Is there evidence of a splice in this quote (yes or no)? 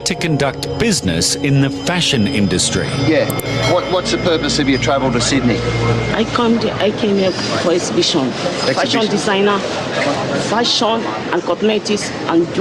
no